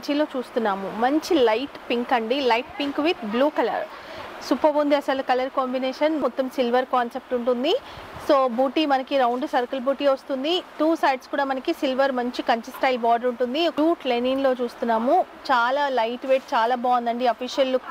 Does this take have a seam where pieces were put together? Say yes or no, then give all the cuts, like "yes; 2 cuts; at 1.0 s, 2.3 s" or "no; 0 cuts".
yes; 2 cuts; at 6.2 s, 13.7 s